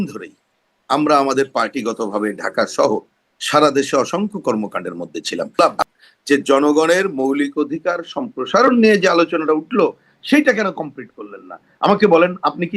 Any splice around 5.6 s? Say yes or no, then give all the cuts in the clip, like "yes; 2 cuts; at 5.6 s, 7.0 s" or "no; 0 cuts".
yes; 1 cut; at 5.6 s